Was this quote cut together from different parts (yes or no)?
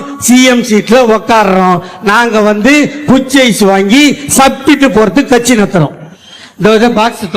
yes